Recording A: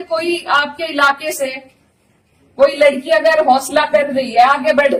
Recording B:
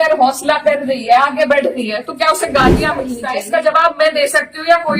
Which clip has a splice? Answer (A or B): B